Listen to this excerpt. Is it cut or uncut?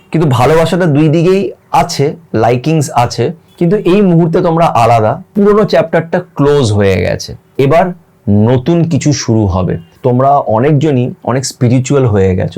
cut